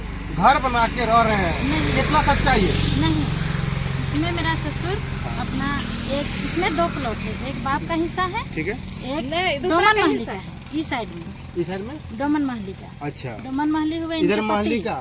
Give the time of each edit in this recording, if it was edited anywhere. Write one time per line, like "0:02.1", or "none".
none